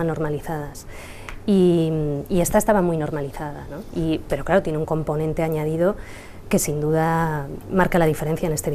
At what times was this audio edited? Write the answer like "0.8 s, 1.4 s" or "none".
none